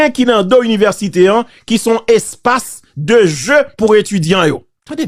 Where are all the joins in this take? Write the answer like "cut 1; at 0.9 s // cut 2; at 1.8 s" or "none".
none